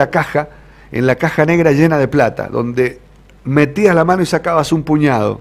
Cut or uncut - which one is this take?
uncut